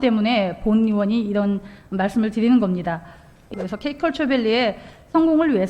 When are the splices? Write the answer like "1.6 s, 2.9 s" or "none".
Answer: 3.5 s

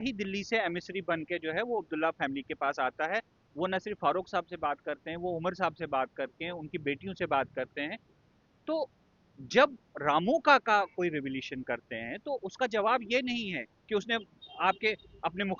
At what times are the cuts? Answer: none

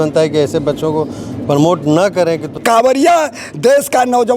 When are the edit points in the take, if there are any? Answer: 2.6 s

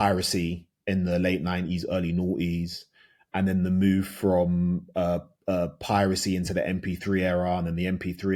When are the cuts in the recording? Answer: none

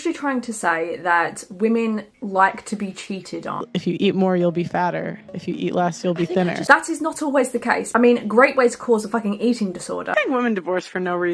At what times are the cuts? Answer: 3.7 s, 6.6 s, 7.9 s, 10.1 s

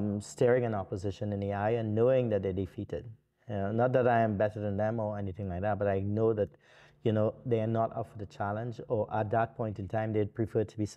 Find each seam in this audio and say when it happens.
none

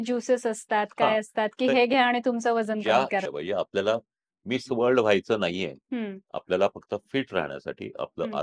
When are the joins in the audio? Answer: 3.3 s, 6.2 s

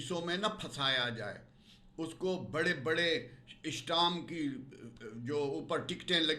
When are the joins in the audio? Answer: none

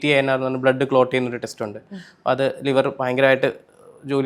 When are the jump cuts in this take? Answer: none

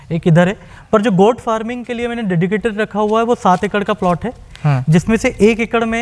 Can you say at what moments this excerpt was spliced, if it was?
none

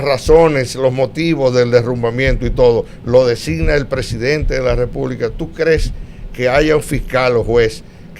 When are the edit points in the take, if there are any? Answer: none

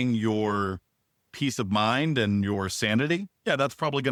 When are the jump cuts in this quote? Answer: none

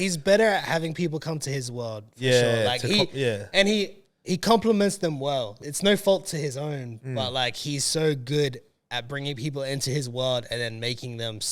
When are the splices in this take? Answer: 5.5 s

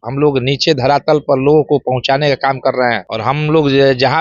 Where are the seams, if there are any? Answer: none

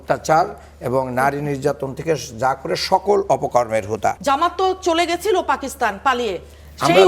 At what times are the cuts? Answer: 4.2 s

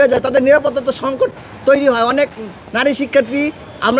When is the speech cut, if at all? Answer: none

